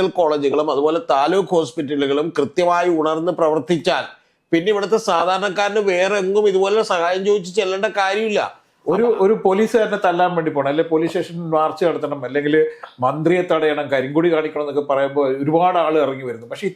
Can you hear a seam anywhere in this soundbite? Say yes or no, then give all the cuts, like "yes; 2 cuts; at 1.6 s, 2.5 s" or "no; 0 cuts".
yes; 1 cut; at 8.6 s